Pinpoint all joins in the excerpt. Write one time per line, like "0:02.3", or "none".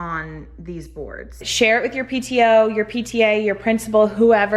0:01.4

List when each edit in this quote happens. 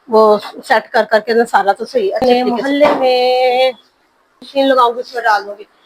0:02.2
0:04.5

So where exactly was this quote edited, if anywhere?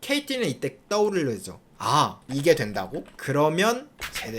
0:03.1

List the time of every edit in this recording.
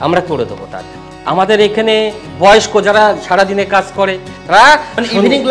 0:01.1
0:04.3

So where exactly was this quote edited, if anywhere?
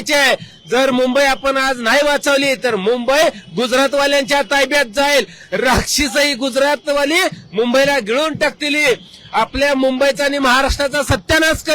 none

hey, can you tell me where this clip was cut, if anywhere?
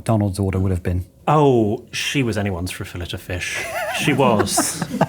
0:01.1

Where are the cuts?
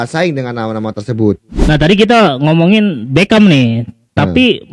0:01.5

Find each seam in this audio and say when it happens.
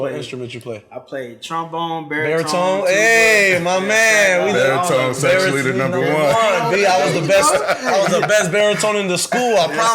none

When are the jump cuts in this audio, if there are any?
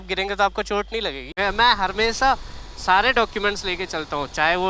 0:01.2

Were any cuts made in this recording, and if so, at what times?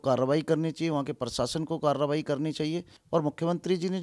0:02.9

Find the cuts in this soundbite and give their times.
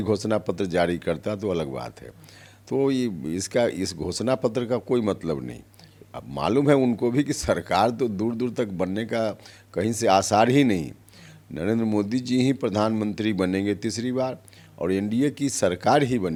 none

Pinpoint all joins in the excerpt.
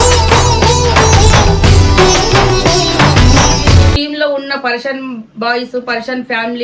0:04.0

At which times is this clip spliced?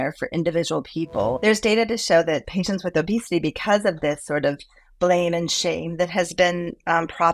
0:01.4

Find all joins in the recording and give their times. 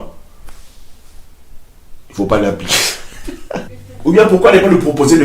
0:03.9

